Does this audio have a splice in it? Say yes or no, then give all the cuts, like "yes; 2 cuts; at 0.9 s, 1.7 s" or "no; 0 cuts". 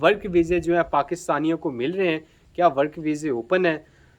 no; 0 cuts